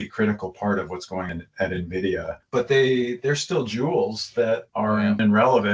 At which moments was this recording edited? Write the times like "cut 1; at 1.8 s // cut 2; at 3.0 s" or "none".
cut 1; at 2.4 s